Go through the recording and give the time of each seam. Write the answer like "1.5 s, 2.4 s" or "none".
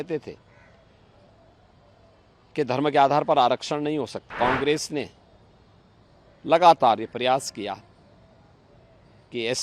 4.3 s